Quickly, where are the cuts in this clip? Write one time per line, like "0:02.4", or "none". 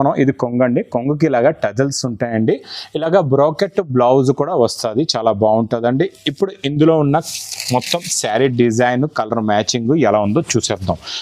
none